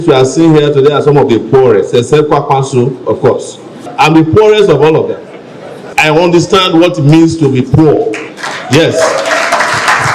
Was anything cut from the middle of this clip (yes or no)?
yes